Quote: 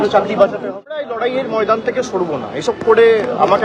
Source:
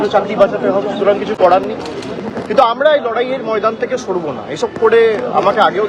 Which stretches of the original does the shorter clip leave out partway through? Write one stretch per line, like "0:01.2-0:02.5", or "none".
0:01.0-0:03.0